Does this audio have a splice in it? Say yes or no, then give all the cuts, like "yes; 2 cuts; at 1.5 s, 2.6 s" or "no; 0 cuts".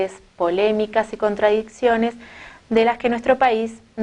no; 0 cuts